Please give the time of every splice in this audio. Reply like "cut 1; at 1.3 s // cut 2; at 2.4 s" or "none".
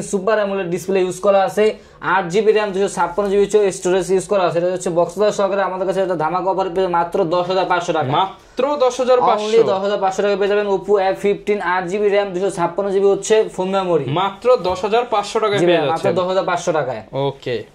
none